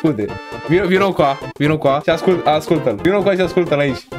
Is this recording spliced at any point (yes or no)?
yes